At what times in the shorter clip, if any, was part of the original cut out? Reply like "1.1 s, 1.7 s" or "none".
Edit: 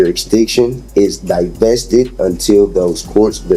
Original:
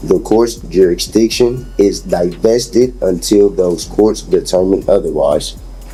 none